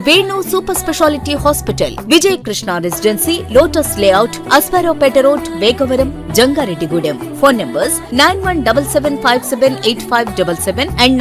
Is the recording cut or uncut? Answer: uncut